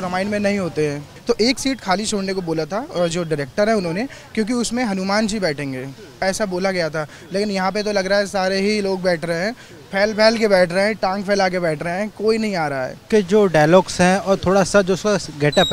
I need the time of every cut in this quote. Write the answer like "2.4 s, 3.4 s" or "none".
1.1 s, 13.0 s